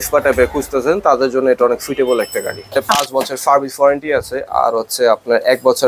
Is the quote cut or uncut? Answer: cut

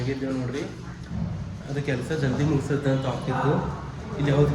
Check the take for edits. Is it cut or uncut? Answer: uncut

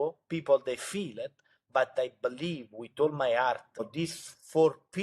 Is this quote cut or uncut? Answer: cut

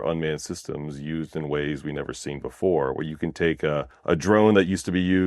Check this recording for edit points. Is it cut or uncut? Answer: cut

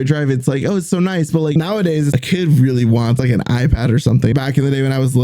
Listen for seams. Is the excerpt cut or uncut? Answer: cut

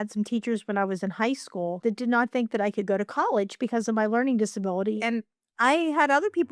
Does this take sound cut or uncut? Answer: cut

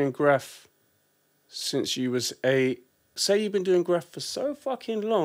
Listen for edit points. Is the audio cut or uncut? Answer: cut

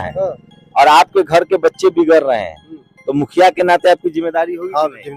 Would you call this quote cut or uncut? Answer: uncut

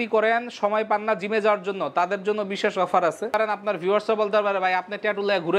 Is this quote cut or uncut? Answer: cut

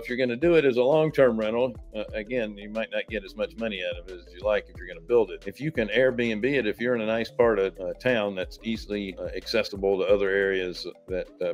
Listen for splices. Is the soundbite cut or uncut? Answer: cut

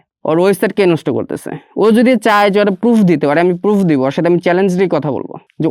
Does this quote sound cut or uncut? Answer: uncut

